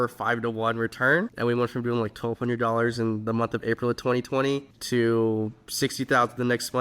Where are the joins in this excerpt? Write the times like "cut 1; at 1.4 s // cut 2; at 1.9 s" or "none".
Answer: cut 1; at 1.3 s // cut 2; at 4.7 s